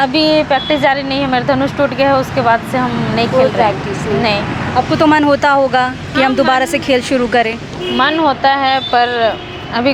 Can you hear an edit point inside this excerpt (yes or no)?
no